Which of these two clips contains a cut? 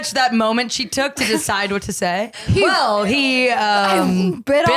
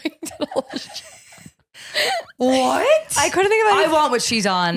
first; 1 cut; at 2.5 s

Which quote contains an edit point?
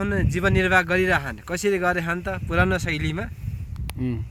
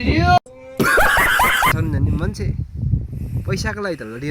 second; 1 cut; at 1.8 s

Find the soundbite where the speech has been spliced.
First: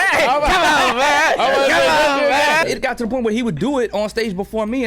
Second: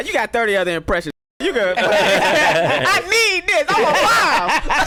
first; 1 cut; at 2.6 s

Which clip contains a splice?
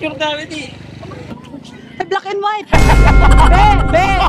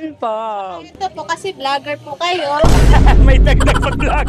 first; 1 cut; at 1.3 s

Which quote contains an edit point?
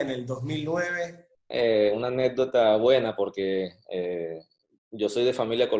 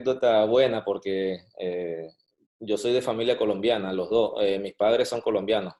first; 1 cut; at 1.4 s

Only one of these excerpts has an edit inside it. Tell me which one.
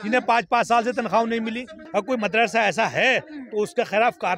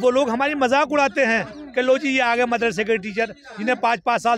first; 1 cut; at 1.8 s

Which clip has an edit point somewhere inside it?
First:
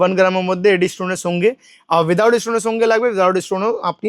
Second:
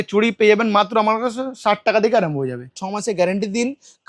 second; 1 cut; at 2.8 s

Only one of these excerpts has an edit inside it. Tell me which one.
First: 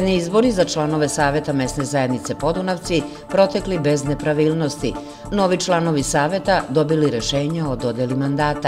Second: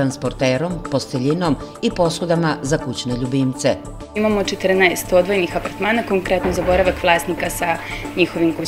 second; 1 cut; at 4.1 s

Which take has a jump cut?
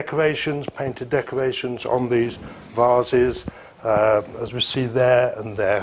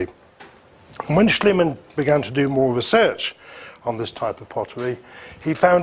second; 1 cut; at 2.7 s

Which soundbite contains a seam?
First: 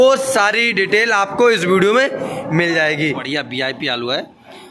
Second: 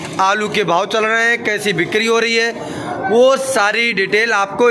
first; 1 cut; at 3.1 s

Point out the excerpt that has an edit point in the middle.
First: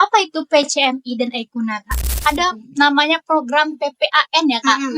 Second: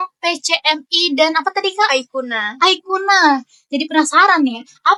first; 1 cut; at 2.1 s

